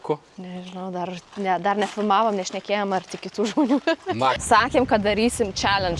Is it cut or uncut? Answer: cut